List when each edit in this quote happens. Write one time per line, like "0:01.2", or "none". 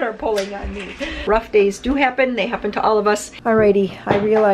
0:01.2
0:03.3

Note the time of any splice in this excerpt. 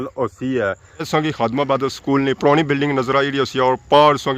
0:01.1

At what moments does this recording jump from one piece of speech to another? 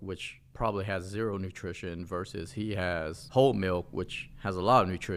none

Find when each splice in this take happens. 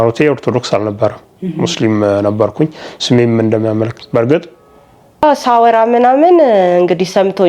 0:05.2

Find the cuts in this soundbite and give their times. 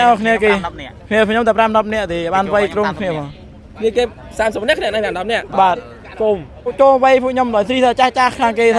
0:06.7

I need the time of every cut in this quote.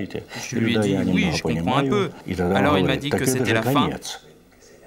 0:02.2

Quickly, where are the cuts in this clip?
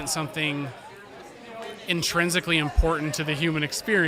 none

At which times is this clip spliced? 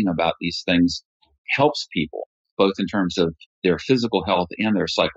none

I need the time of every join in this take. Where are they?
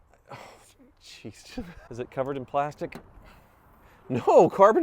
0:01.8

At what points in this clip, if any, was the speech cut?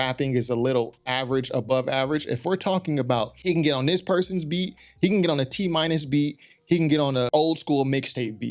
0:03.4
0:07.3

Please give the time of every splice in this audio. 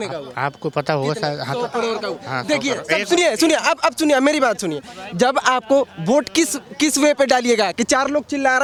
none

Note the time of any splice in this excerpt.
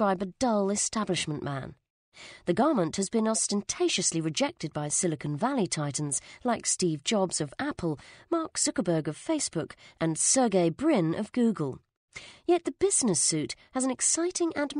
0:02.6

